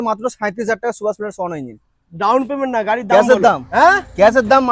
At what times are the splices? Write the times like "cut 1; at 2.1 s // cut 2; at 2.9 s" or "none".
none